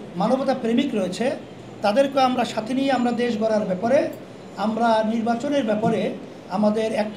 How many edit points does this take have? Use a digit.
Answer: 0